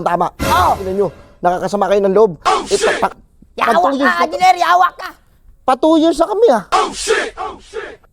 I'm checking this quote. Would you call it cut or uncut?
uncut